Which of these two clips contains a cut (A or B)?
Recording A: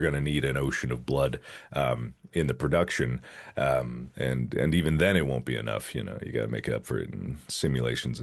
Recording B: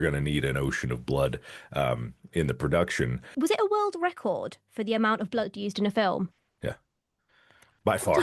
B